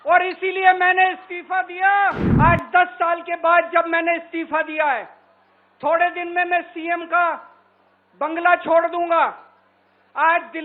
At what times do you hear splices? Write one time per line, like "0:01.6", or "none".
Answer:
0:02.2